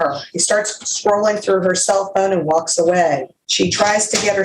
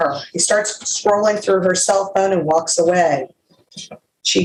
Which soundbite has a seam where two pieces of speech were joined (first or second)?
first